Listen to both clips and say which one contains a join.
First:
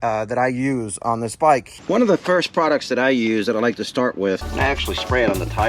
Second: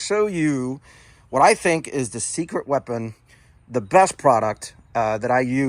first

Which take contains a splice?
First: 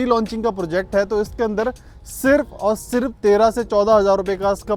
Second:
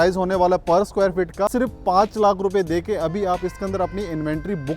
second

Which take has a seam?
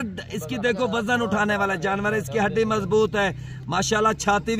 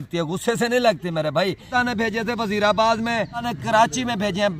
second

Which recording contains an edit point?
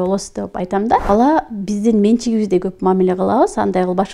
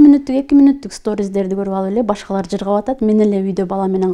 first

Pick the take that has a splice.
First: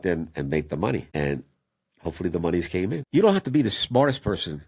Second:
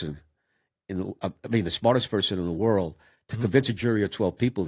first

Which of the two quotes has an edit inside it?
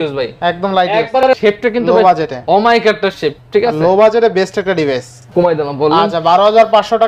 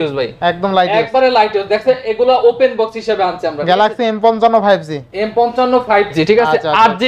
first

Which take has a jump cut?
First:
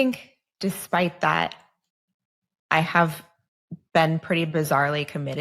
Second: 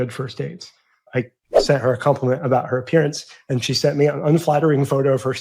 second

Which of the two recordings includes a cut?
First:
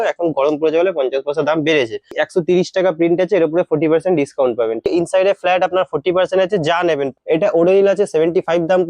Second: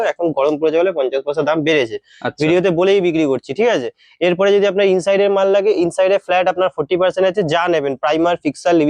first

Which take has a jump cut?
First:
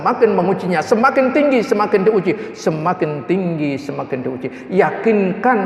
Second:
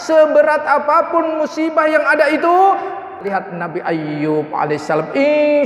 second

